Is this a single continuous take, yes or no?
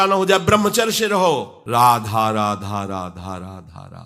no